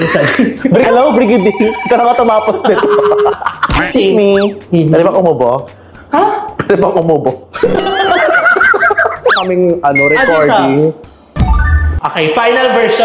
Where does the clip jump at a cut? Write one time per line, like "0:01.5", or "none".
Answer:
0:00.8
0:03.8
0:09.4